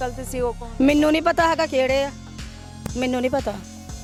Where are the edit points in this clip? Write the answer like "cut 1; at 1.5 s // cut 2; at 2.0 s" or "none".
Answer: none